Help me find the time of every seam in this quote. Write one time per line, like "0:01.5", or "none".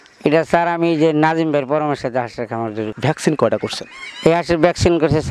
0:02.9